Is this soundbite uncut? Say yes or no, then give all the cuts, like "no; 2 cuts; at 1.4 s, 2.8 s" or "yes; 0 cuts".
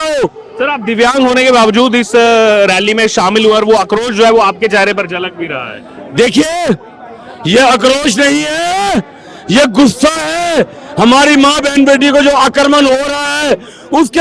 yes; 0 cuts